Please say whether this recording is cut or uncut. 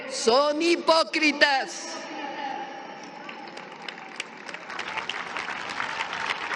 uncut